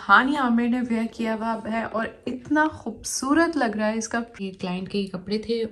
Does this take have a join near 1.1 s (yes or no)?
no